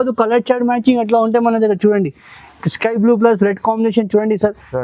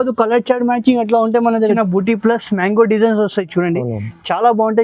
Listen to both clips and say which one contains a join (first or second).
second